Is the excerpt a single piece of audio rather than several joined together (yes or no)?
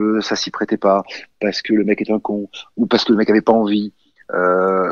yes